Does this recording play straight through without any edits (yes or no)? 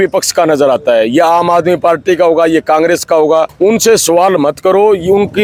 yes